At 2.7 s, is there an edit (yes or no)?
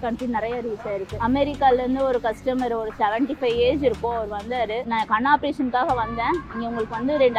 no